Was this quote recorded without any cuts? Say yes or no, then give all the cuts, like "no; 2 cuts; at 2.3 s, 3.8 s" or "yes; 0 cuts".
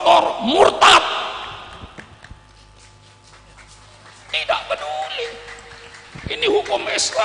yes; 0 cuts